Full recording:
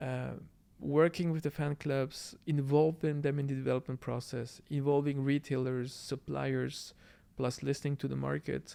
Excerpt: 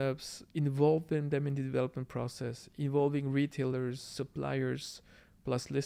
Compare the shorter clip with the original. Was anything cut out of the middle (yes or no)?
no